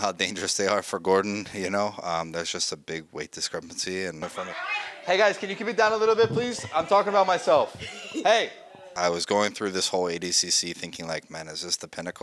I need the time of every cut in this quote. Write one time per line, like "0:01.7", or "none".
0:04.2
0:08.8